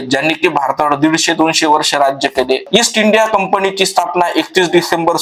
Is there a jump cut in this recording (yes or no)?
no